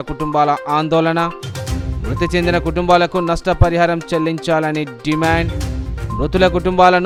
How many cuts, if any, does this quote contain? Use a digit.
0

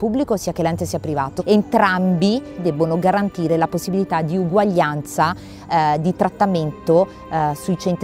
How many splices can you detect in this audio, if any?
0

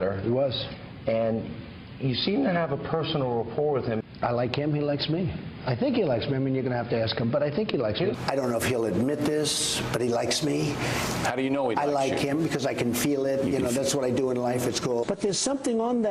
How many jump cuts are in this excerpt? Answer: 0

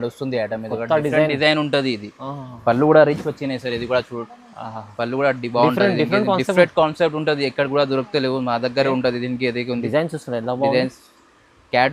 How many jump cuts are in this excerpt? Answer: 0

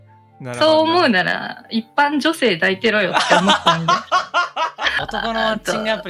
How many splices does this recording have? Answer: 1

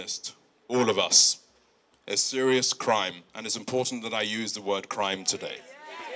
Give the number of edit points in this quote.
0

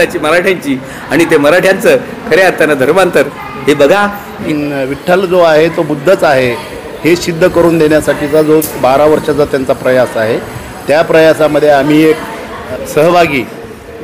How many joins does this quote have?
2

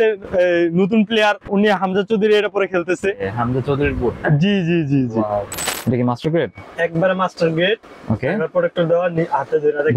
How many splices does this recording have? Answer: 2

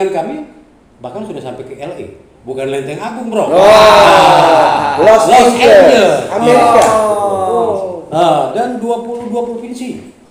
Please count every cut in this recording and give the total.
0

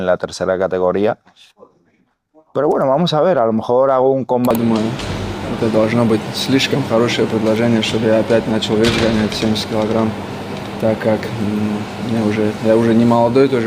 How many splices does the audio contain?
1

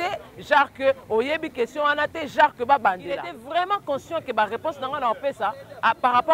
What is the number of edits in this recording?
1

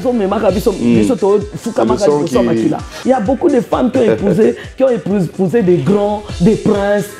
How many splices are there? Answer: 1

